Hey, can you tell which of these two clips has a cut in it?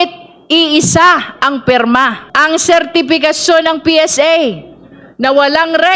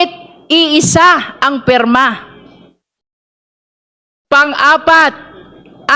first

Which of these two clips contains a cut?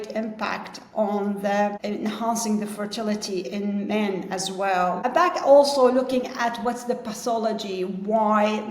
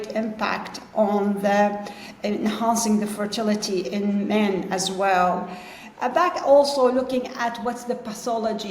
first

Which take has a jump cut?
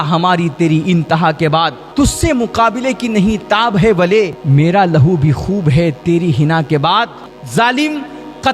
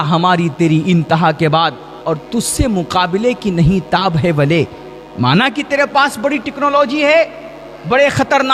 first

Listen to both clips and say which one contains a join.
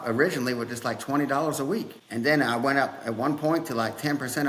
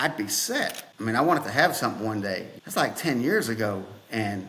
second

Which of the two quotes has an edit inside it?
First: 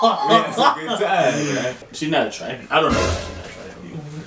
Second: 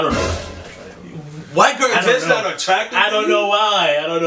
first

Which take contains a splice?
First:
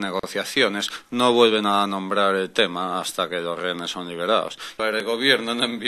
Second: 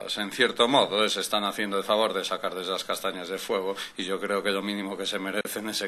first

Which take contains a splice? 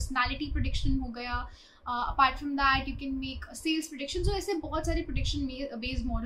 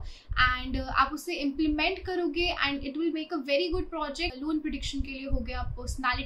second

